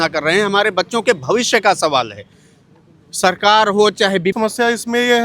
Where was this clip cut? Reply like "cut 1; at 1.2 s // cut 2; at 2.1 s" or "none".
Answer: cut 1; at 4.3 s